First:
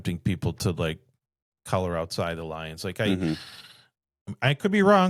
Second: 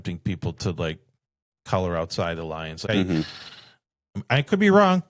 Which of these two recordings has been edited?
second; 1 cut; at 2.8 s

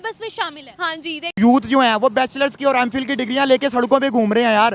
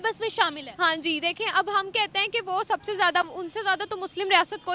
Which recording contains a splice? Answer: first; 1 cut; at 1.3 s

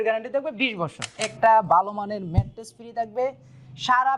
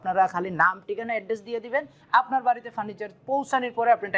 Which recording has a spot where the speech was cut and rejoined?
first; 1 cut; at 1.2 s

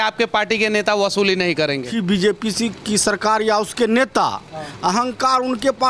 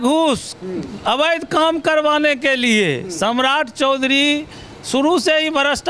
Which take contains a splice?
first; 1 cut; at 1.9 s

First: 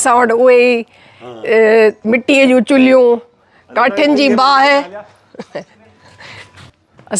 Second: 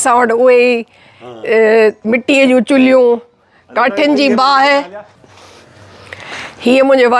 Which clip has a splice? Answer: second; 1 cut; at 5.2 s

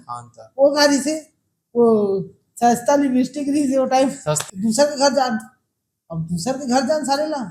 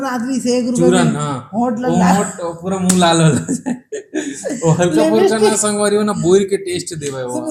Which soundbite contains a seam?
first; 1 cut; at 4.4 s

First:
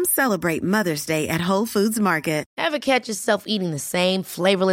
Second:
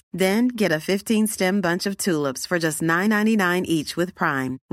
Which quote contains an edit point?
first; 1 cut; at 2.5 s

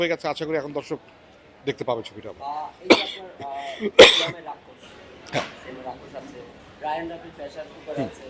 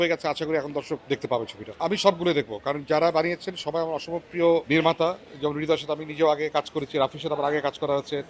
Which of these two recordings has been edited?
second; 2 cuts; at 1.4 s, 4.6 s

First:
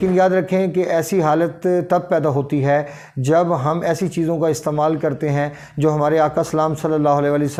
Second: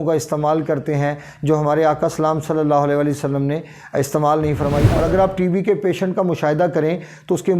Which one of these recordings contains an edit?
second; 1 cut; at 4.9 s

